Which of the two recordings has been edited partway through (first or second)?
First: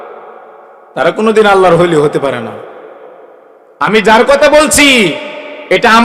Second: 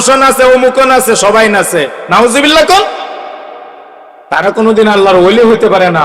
second